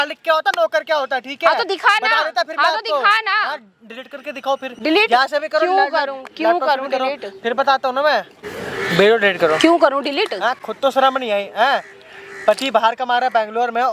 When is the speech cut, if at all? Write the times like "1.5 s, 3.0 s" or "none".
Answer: none